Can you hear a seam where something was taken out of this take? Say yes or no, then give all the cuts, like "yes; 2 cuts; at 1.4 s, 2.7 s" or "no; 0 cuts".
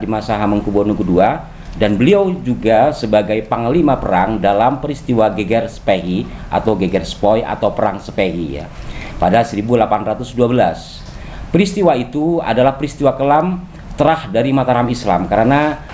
no; 0 cuts